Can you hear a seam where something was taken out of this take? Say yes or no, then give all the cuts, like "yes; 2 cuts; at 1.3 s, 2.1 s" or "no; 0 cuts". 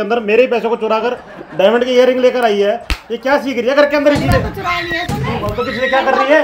no; 0 cuts